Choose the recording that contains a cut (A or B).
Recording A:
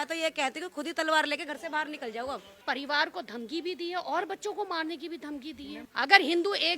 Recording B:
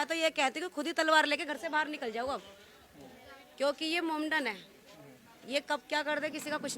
A